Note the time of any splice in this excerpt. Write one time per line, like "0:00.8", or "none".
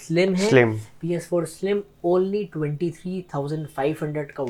none